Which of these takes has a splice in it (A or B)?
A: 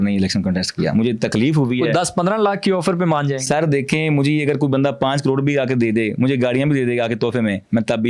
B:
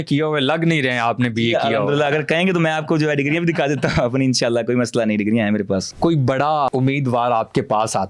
B